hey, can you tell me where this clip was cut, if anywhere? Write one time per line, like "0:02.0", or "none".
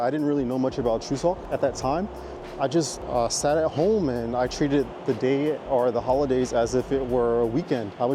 none